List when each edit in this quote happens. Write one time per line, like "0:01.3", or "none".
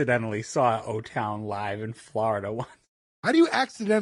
none